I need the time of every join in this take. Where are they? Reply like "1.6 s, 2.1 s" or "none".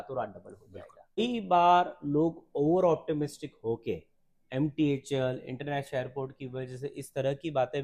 1.2 s